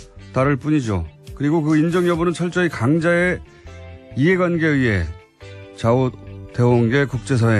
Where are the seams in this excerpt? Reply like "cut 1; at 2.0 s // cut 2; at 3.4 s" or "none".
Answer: cut 1; at 4.7 s